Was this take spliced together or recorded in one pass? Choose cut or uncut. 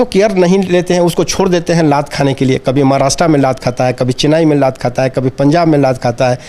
uncut